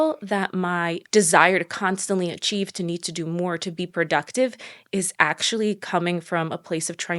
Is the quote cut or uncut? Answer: uncut